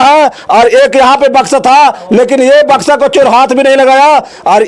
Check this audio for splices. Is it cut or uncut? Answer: uncut